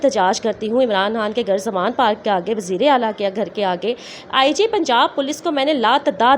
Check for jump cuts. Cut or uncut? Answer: uncut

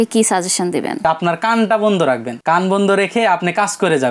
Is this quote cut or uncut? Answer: cut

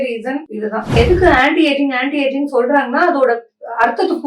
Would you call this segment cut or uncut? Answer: cut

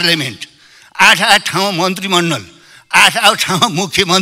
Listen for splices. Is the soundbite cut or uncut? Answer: uncut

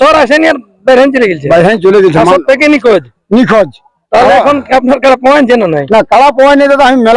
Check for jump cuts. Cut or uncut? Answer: uncut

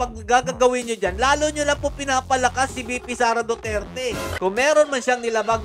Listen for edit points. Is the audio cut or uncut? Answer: cut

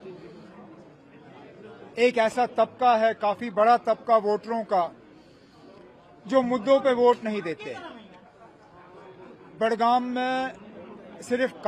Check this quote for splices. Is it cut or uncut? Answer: uncut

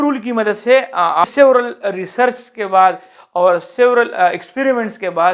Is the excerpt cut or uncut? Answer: cut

